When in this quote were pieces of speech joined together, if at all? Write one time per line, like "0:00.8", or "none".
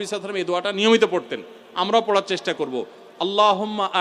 none